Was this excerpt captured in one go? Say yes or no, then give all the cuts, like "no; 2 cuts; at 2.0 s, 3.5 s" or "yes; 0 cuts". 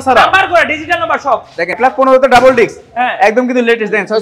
no; 1 cut; at 1.8 s